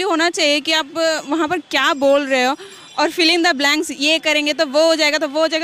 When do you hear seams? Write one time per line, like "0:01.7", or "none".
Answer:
none